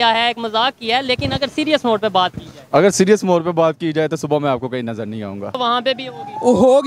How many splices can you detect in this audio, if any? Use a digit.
1